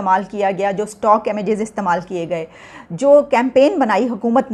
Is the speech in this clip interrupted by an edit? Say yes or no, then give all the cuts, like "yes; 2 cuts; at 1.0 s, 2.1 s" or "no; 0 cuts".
no; 0 cuts